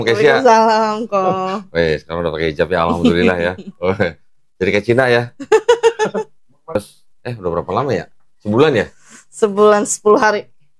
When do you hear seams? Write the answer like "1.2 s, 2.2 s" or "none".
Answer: 6.8 s